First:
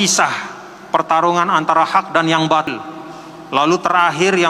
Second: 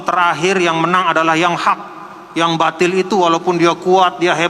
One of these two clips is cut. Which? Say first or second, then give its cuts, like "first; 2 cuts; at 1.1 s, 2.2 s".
first; 1 cut; at 2.7 s